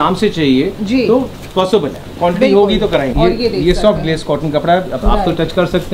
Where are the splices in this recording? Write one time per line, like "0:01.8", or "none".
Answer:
0:03.1